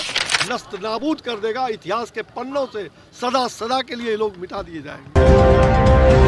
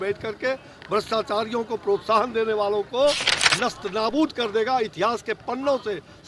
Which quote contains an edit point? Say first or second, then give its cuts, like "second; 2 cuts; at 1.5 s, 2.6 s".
first; 1 cut; at 5.2 s